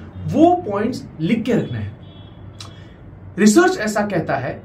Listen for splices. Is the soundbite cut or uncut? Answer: uncut